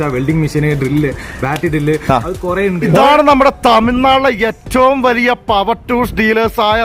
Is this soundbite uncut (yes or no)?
no